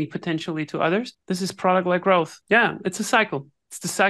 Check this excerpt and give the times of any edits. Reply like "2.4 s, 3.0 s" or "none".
1.2 s, 2.4 s